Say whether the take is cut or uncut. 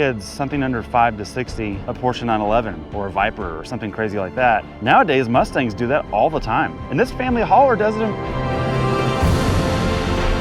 cut